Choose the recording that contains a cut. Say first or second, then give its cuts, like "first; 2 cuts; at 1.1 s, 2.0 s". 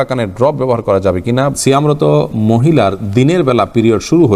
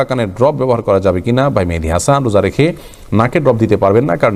first; 1 cut; at 1.5 s